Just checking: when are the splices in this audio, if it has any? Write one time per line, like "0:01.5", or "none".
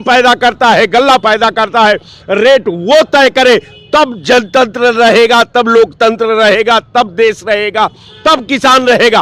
none